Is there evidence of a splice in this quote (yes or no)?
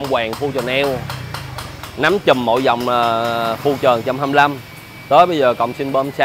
no